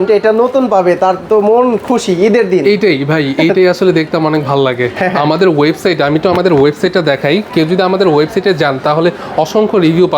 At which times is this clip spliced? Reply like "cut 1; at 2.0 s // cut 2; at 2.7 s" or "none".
none